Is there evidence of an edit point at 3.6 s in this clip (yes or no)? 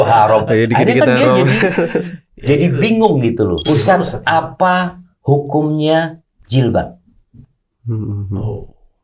yes